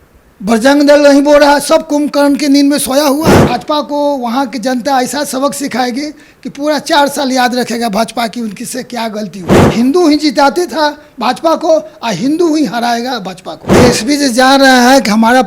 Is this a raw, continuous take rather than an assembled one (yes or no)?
no